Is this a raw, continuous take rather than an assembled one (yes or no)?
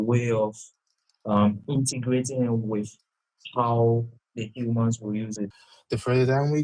no